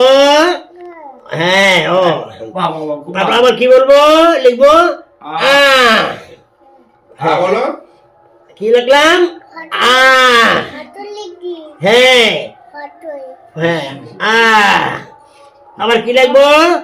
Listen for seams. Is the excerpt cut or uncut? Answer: uncut